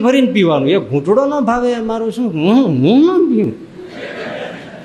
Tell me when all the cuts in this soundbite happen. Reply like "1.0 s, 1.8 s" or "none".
none